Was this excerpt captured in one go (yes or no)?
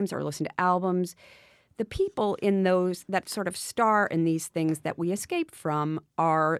yes